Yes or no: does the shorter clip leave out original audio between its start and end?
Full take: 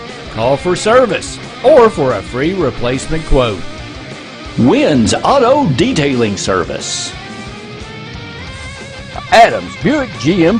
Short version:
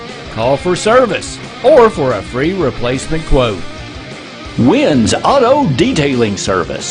no